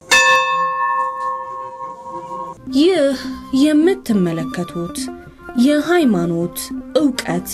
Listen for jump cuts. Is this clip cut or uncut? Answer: uncut